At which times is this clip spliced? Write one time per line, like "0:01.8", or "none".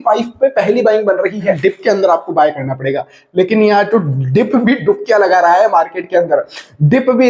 0:01.6